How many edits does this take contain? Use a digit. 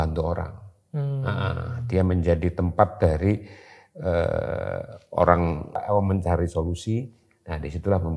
1